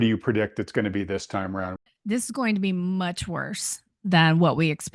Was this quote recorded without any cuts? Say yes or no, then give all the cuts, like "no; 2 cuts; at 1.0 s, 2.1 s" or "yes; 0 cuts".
no; 1 cut; at 1.8 s